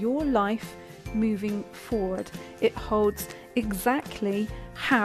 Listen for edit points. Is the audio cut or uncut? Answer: uncut